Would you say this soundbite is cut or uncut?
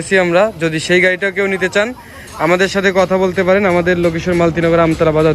uncut